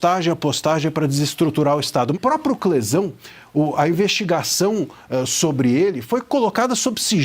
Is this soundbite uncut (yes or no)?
no